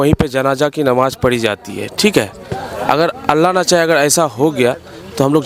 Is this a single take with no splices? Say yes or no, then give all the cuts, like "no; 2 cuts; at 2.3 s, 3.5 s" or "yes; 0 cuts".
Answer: yes; 0 cuts